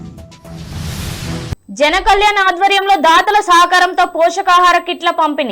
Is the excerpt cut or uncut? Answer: cut